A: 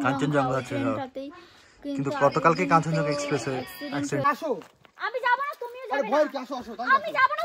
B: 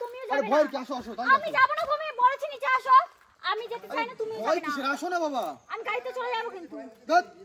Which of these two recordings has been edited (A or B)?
A